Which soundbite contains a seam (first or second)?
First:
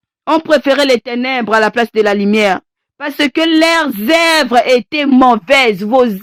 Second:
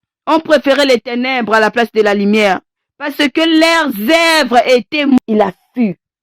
second